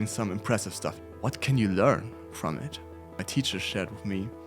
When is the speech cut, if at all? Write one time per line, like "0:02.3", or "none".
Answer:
0:01.0
0:03.1